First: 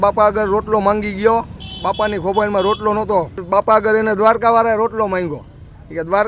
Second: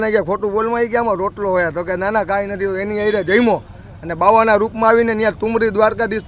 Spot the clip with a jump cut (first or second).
first